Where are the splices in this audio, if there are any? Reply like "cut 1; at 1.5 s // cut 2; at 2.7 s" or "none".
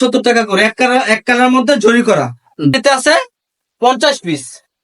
cut 1; at 2.7 s